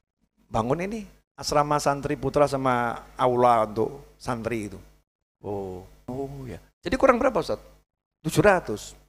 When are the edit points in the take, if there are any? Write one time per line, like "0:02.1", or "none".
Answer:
0:06.1